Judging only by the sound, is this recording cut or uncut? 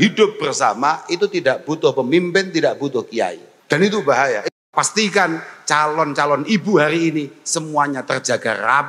cut